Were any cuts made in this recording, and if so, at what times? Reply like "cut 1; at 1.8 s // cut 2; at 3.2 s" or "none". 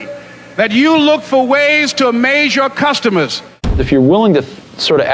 cut 1; at 3.8 s